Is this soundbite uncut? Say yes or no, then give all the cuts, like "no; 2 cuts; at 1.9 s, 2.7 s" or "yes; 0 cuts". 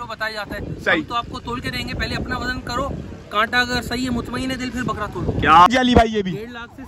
no; 1 cut; at 5.7 s